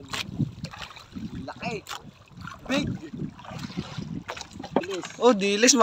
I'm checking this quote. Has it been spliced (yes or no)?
yes